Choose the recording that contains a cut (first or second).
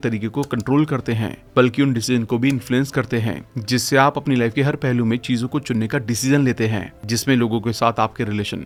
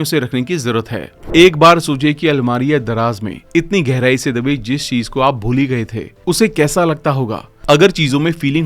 second